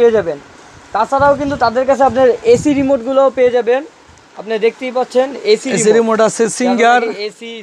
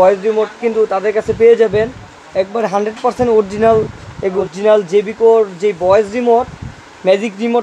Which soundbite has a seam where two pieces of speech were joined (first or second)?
second